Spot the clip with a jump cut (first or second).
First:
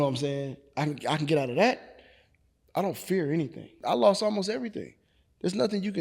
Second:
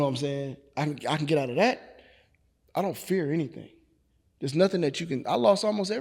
first